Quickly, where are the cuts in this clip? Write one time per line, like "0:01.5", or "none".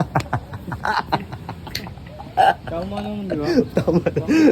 none